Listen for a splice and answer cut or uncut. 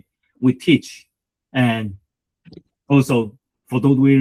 uncut